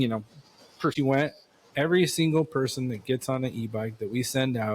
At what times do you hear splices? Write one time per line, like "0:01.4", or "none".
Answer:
0:00.9

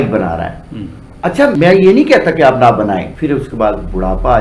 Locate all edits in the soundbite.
0:03.1

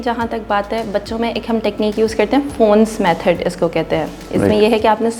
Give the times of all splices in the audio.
none

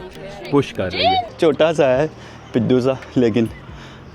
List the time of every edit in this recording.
0:01.3

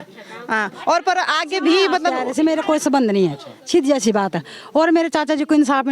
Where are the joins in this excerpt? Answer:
0:02.2

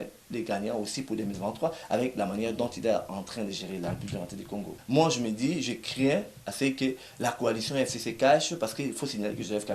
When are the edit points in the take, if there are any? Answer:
0:04.8

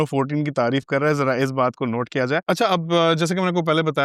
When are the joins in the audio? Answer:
none

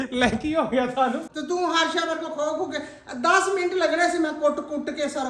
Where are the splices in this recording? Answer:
0:01.3

